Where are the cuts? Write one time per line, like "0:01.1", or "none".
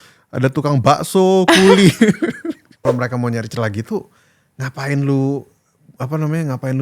0:02.8